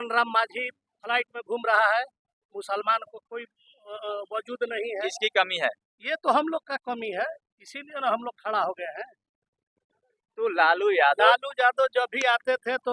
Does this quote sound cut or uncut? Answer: uncut